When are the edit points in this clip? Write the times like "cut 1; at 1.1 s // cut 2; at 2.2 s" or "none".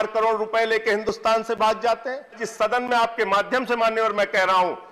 cut 1; at 2.5 s

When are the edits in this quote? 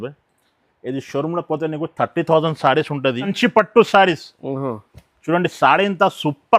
cut 1; at 3.3 s

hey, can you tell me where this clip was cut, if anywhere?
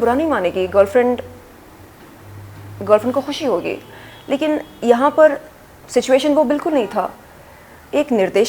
none

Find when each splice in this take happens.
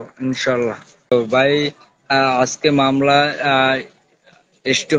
cut 1; at 1.1 s

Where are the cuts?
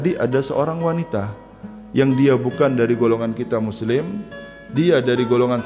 none

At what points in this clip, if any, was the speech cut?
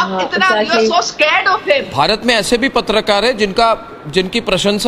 cut 1; at 1.9 s

